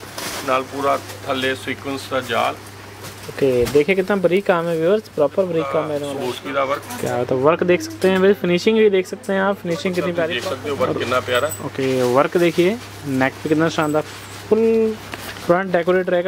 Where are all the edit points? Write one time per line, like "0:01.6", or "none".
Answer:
0:06.1
0:10.5